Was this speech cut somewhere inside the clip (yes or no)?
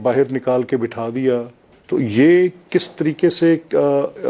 no